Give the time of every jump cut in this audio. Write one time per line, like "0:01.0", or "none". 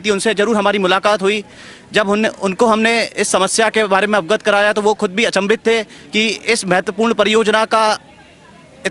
none